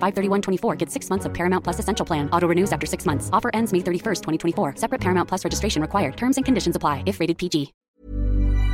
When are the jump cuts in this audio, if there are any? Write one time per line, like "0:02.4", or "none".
0:07.8